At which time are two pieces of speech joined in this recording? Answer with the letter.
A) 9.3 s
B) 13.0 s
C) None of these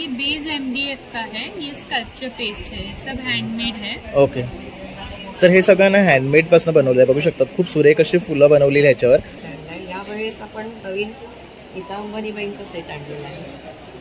A